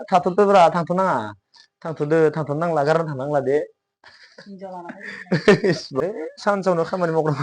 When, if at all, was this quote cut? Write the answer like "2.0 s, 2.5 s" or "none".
6.0 s